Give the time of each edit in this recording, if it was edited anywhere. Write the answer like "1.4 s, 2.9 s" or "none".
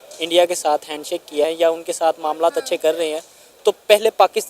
1.4 s